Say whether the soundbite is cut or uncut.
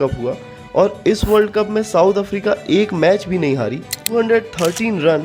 cut